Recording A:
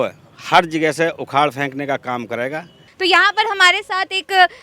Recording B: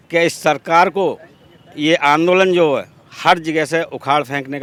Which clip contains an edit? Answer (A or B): A